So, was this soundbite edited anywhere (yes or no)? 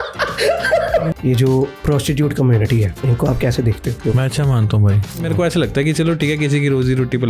yes